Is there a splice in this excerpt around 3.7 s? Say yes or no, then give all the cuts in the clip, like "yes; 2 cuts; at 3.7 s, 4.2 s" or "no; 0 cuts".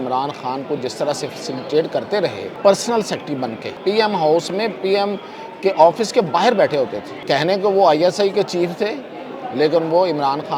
yes; 3 cuts; at 2.5 s, 3.7 s, 7.1 s